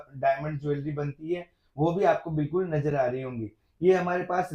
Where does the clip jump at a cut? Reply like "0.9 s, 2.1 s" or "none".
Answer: none